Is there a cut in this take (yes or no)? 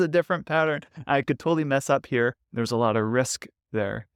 no